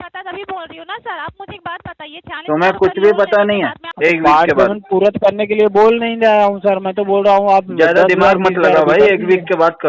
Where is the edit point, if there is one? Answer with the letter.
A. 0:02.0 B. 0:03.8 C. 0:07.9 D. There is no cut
B